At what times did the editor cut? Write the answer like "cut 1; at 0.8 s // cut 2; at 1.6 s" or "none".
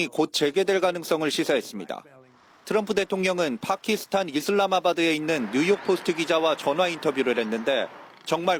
none